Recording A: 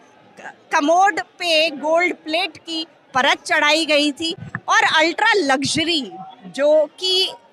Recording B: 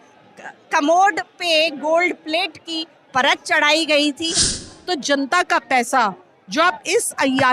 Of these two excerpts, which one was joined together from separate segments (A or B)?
B